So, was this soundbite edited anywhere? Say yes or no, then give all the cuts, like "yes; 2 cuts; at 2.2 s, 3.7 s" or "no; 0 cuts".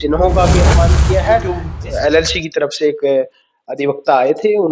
yes; 1 cut; at 1.7 s